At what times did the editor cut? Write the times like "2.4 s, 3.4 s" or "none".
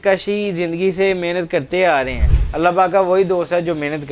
2.4 s